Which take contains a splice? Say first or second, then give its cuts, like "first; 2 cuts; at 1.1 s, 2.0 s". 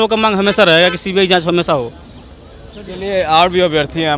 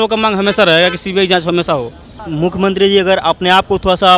second; 1 cut; at 2.3 s